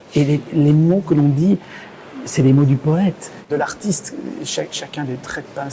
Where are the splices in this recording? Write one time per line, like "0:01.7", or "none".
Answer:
0:03.5